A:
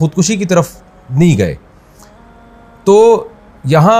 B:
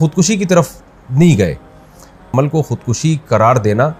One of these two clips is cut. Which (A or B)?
B